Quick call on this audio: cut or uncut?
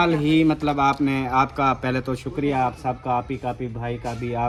uncut